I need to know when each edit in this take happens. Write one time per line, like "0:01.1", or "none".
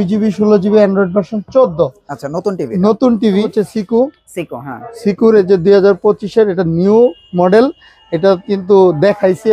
0:03.5

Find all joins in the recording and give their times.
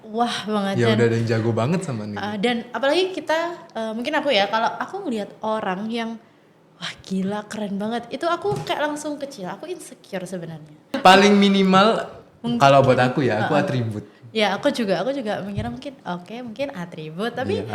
0:10.9

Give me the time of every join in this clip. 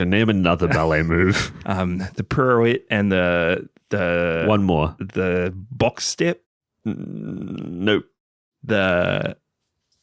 none

